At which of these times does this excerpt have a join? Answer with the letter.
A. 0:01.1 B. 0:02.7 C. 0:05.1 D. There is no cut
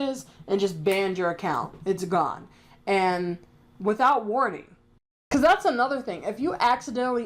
C